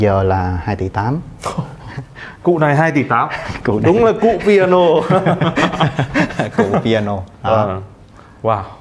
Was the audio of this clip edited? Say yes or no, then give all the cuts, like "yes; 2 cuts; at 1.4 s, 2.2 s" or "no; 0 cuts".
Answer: no; 0 cuts